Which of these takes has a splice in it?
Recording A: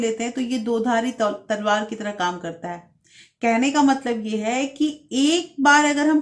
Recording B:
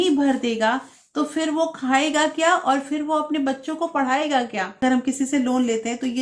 B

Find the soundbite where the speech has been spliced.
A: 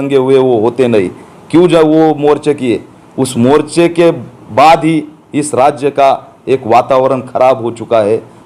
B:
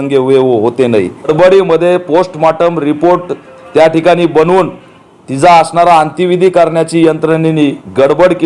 B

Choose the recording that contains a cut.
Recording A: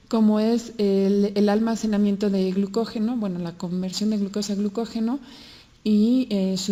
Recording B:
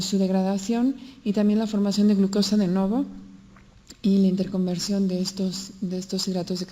B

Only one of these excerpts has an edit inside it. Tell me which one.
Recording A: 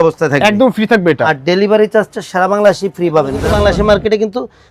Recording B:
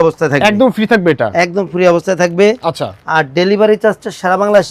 A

